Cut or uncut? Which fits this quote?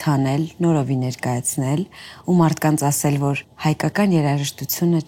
cut